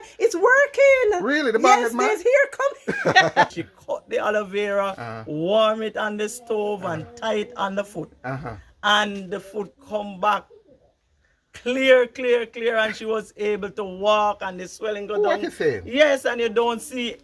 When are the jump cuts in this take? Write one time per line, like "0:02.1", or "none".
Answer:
0:03.5